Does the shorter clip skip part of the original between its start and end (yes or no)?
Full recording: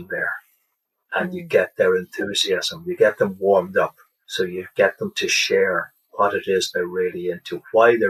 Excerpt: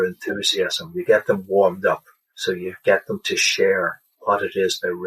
no